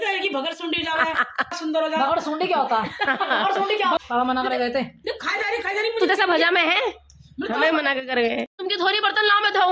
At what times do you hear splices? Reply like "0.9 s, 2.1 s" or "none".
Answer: 1.5 s, 4.0 s, 8.5 s